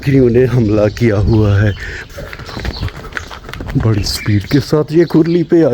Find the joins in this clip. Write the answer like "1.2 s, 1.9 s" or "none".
1.9 s